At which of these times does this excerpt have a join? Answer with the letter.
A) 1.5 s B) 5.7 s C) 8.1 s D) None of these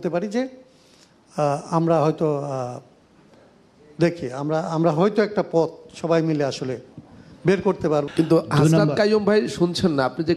C